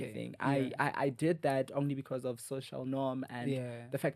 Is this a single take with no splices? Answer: yes; 0 cuts

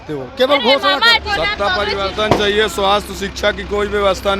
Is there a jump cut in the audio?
yes; 1 cut; at 1.3 s

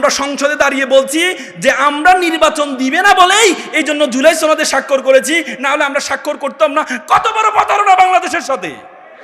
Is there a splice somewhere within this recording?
no; 0 cuts

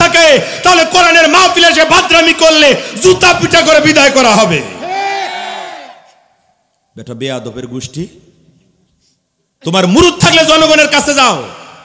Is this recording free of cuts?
yes; 0 cuts

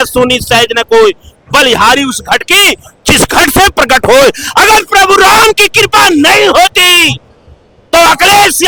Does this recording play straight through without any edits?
yes; 0 cuts

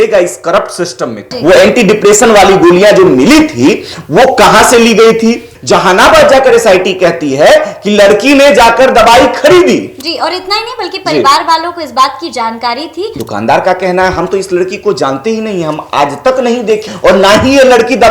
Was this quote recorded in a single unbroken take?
no; 4 cuts; at 1.2 s, 5.5 s, 13.1 s, 16.8 s

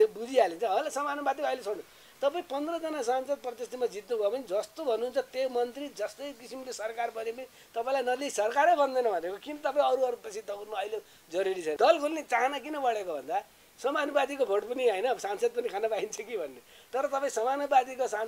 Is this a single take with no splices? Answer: no; 1 cut; at 11.8 s

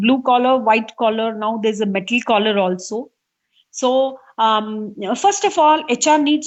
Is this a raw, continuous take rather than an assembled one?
yes; 0 cuts

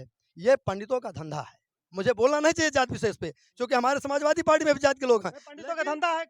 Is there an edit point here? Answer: no; 0 cuts

